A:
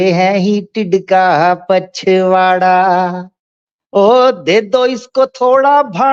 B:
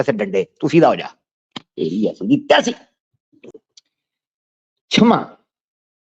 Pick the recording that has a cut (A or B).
B